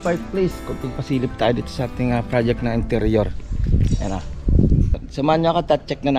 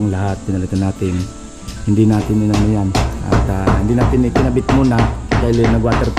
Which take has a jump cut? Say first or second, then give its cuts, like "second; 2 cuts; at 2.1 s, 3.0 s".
first; 1 cut; at 4.9 s